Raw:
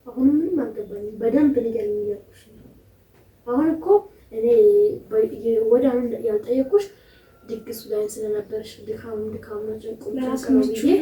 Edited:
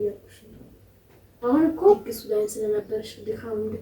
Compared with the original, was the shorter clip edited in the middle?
yes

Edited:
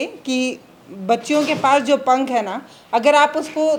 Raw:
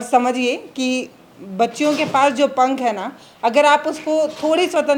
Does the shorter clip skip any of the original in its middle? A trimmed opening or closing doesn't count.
no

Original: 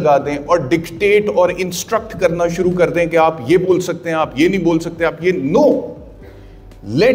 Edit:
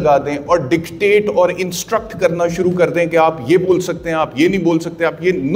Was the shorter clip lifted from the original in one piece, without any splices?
yes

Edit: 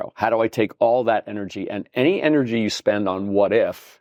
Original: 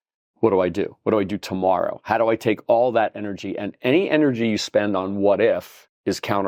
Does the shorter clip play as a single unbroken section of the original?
yes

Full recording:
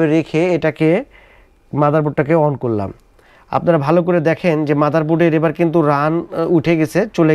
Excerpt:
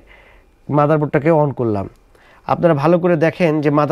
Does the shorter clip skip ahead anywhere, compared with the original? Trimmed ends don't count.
no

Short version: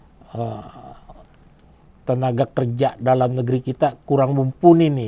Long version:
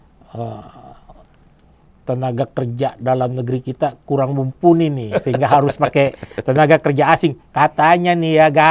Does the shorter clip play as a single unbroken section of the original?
yes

